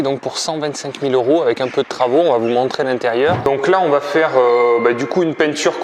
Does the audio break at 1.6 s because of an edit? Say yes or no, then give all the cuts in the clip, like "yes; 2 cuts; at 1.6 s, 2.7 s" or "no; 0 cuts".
no; 1 cut; at 3.5 s